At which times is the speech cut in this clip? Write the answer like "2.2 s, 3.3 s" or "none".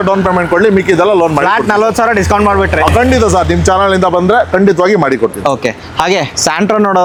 none

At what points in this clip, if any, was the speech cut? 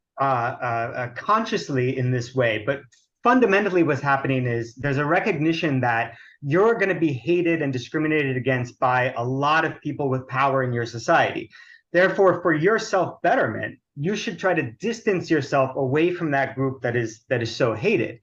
none

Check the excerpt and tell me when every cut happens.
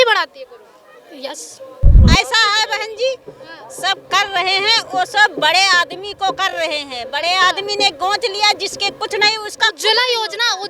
2.0 s

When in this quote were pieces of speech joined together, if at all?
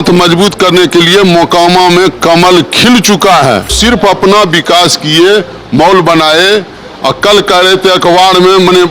3.8 s

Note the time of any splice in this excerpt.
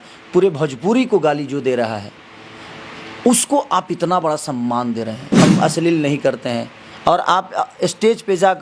5.2 s

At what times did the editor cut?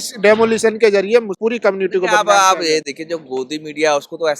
1.4 s

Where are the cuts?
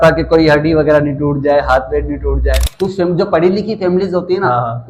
2.7 s

